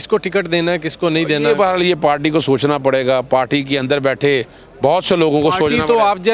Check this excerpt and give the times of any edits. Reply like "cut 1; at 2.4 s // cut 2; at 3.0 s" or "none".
none